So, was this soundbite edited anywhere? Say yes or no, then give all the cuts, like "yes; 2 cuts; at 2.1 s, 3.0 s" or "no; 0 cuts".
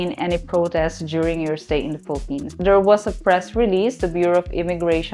no; 0 cuts